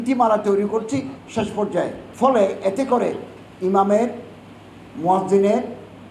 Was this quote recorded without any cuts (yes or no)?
no